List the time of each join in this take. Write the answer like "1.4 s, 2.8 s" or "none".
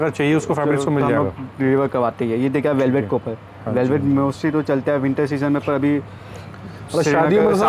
none

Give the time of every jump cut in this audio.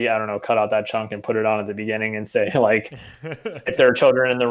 none

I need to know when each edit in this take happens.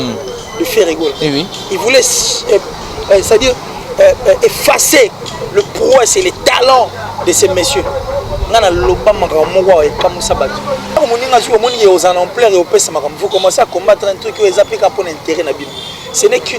11.0 s

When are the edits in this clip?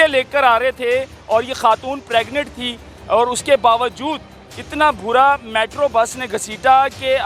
none

